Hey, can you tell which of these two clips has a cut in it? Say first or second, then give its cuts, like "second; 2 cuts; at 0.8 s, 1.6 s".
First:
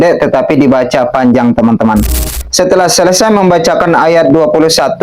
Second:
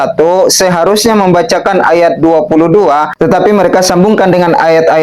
first; 1 cut; at 2.3 s